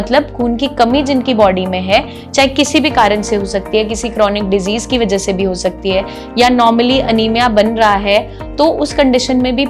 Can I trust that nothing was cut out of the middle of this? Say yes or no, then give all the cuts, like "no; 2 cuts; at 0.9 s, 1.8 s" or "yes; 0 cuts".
yes; 0 cuts